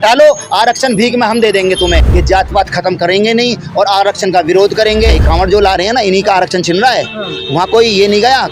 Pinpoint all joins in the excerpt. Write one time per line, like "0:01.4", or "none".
0:02.1
0:05.2